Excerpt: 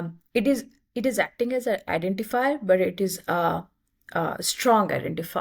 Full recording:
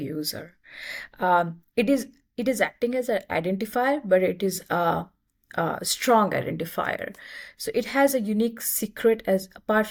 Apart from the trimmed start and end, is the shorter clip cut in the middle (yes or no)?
no